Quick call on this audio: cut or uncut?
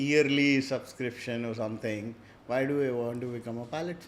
uncut